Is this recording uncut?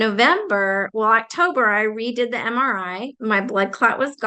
yes; 0 cuts

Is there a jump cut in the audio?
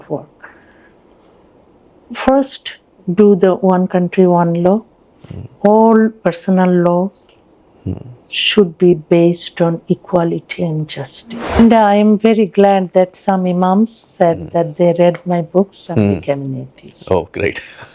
yes; 1 cut; at 11.6 s

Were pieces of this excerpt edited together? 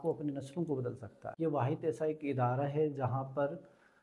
yes; 1 cut; at 1.2 s

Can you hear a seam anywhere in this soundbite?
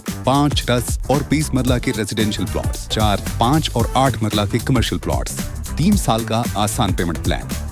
no; 0 cuts

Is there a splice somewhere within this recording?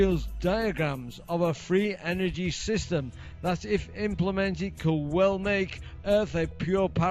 no; 0 cuts

